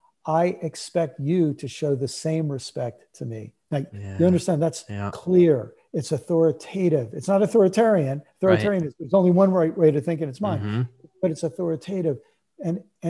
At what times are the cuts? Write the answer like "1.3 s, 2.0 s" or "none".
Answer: none